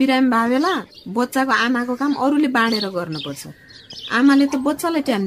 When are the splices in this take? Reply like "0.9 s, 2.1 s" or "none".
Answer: none